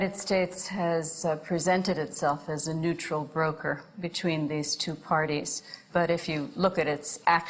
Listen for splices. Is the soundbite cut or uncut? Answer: cut